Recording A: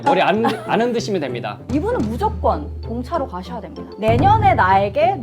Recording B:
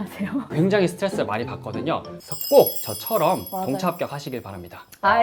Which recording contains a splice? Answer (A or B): A